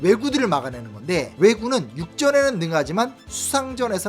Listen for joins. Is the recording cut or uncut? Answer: cut